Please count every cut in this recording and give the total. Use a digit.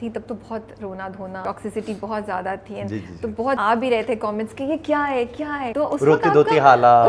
3